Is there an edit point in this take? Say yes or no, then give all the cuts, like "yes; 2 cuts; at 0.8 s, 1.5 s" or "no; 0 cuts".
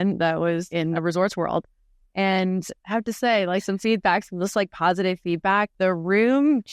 yes; 2 cuts; at 0.9 s, 5.7 s